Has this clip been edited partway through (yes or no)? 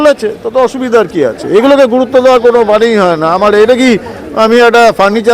no